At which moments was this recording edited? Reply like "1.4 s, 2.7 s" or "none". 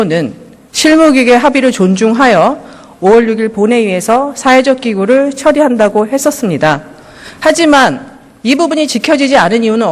7.6 s